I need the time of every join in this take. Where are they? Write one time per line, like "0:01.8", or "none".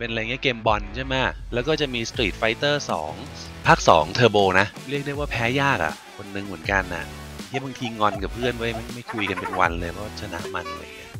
none